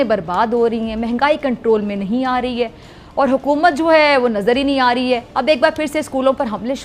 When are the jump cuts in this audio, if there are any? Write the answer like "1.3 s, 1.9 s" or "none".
none